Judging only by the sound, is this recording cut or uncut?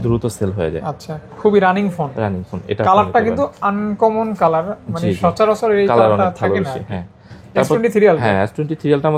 uncut